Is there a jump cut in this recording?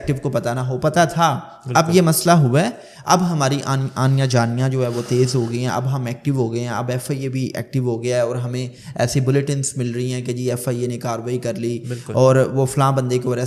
no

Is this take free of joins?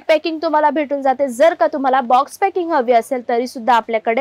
yes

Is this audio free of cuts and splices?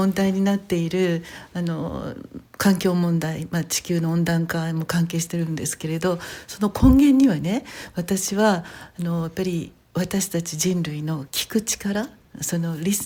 yes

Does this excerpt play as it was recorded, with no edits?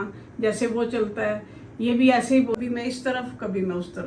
no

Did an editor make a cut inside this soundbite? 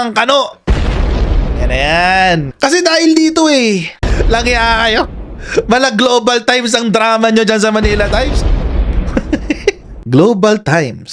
yes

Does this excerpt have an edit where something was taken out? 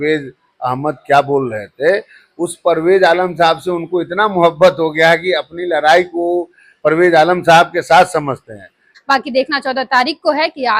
yes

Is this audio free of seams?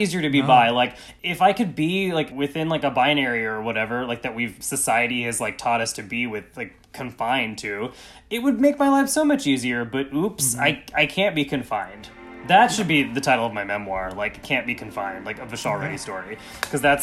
no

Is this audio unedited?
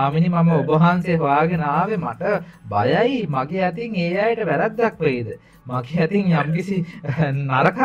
yes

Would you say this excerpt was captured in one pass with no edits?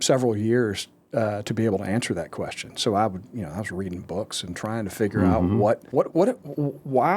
no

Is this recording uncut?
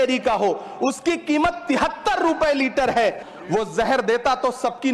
no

